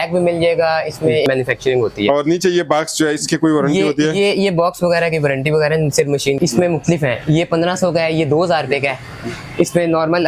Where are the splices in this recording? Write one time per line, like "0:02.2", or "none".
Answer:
0:01.3
0:06.4